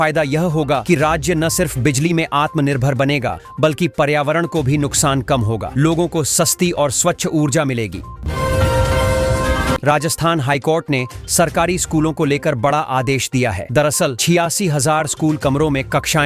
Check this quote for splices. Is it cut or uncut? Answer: cut